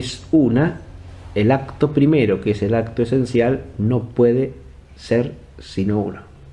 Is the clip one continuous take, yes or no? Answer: no